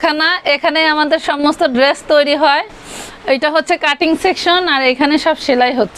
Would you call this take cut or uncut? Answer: uncut